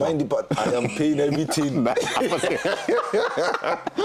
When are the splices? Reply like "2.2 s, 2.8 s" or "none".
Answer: none